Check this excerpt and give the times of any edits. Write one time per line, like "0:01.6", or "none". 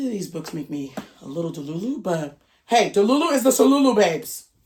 none